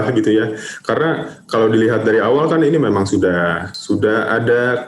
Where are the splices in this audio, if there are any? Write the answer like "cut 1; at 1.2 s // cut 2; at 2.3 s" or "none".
cut 1; at 3.7 s